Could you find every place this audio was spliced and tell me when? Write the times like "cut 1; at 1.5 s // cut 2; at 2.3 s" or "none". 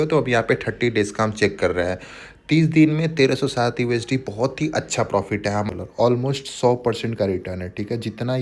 cut 1; at 5.7 s